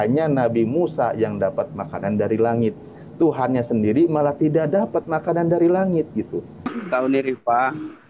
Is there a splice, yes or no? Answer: yes